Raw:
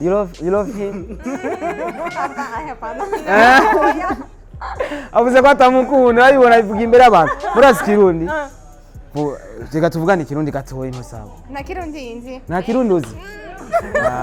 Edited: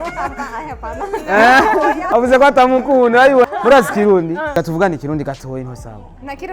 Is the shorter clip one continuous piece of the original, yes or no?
no